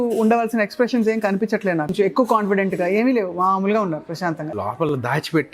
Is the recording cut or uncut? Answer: cut